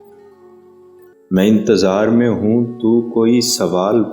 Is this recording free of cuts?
no; 1 cut; at 1.1 s

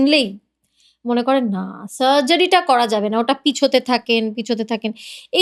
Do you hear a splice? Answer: no; 0 cuts

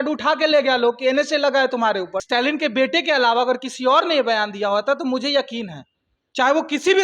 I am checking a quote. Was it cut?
yes; 1 cut; at 2.2 s

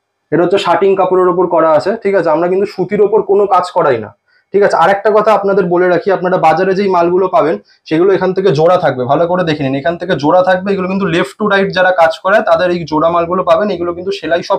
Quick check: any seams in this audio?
no; 0 cuts

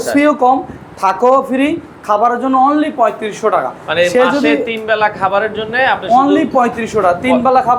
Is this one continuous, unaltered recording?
yes; 0 cuts

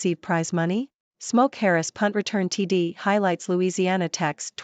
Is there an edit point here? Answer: yes; 1 cut; at 1.0 s

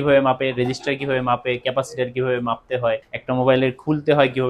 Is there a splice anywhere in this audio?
yes; 1 cut; at 3.1 s

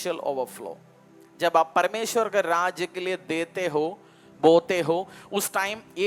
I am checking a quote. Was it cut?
no; 0 cuts

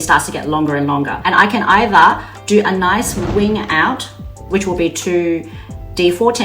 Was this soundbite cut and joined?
yes; 1 cut; at 1.2 s

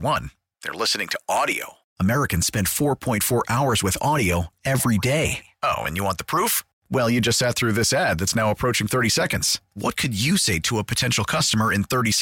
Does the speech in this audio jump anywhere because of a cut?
no; 0 cuts

